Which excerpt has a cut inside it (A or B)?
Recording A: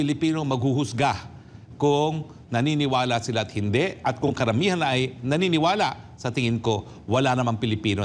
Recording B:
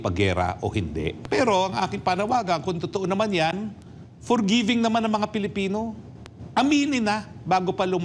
B